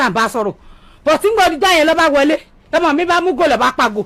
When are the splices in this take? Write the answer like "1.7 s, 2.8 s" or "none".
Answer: none